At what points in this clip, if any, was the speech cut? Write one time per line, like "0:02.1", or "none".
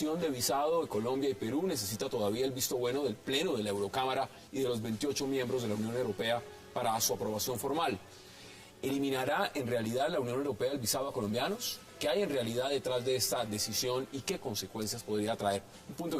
none